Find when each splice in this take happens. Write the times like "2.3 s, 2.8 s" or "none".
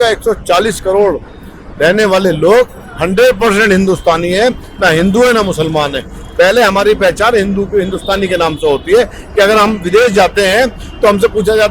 none